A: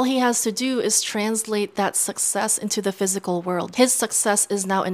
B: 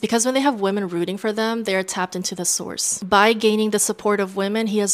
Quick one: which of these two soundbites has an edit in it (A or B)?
B